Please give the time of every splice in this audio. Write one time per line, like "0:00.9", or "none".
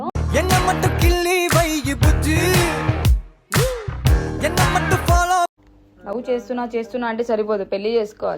0:05.7

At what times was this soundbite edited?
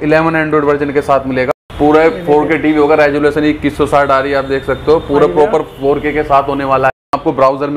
0:01.5
0:06.9

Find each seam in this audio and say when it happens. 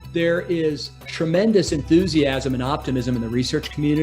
0:01.0

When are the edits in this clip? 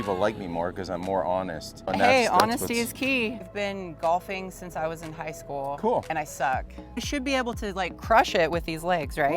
0:01.9
0:03.4
0:07.1

